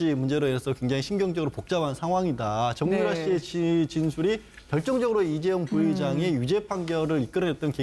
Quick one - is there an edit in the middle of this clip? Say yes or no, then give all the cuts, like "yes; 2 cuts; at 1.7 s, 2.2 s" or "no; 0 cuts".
yes; 1 cut; at 6.8 s